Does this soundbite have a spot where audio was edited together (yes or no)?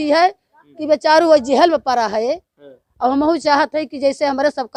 no